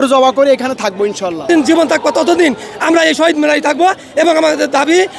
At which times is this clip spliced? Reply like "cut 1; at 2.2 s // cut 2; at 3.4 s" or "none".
cut 1; at 1.4 s